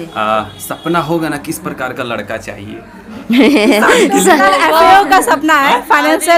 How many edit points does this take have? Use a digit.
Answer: 0